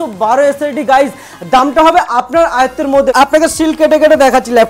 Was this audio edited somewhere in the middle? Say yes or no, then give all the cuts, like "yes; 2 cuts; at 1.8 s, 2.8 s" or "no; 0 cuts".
yes; 1 cut; at 3.1 s